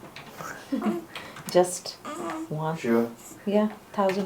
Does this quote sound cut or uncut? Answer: uncut